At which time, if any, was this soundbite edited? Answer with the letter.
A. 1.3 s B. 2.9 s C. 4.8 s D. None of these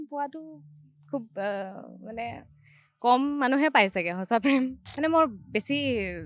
C